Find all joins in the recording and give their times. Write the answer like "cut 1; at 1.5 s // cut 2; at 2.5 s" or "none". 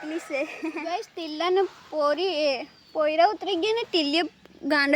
cut 1; at 1.1 s